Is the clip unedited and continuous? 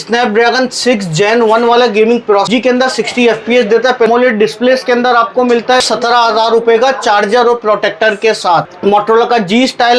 no; 4 cuts; at 2.5 s, 4.1 s, 5.8 s, 8.7 s

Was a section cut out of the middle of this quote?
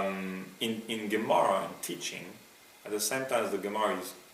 no; 0 cuts

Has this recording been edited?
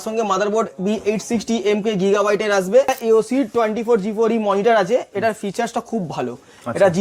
yes; 1 cut; at 2.9 s

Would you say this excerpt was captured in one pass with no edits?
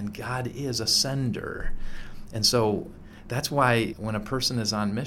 no; 1 cut; at 3.9 s

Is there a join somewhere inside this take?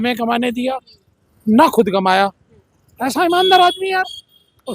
no; 0 cuts

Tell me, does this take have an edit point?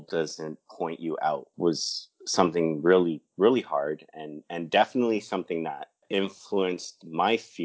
yes; 2 cuts; at 1.5 s, 6.0 s

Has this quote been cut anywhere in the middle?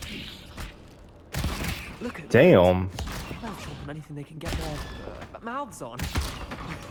no; 0 cuts

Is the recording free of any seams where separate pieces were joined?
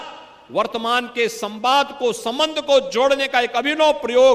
yes; 0 cuts

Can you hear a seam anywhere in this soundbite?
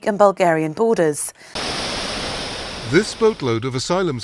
yes; 1 cut; at 1.7 s

